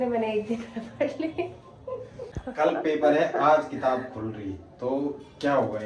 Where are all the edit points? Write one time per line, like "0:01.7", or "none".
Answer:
0:02.3